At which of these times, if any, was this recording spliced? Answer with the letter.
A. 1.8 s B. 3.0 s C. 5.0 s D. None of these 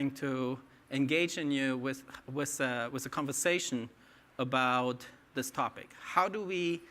A